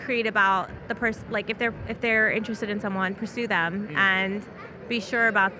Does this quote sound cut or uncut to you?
uncut